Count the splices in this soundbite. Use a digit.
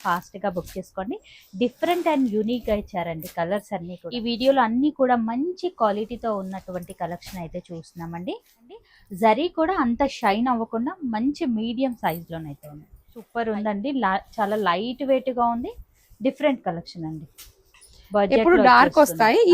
3